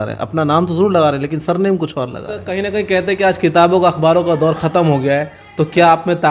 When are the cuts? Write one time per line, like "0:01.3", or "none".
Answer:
0:02.6